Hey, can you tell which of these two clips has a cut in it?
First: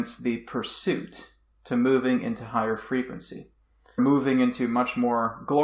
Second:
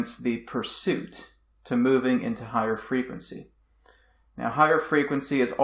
second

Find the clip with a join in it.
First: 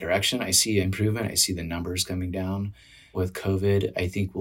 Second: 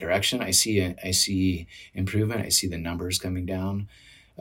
first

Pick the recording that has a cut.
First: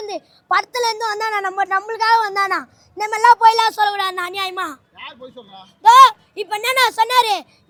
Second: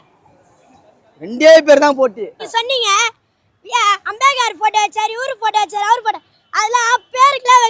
second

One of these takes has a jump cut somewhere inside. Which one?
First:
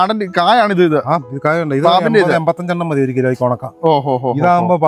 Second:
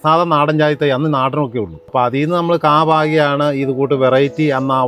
second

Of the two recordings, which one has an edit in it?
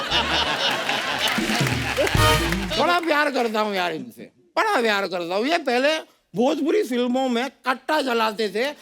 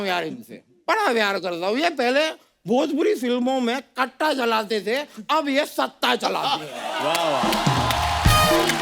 first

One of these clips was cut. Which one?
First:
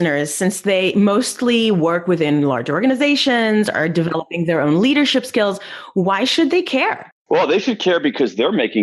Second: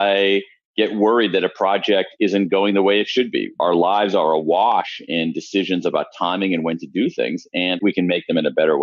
second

